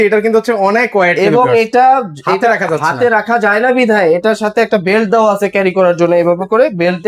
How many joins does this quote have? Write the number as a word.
zero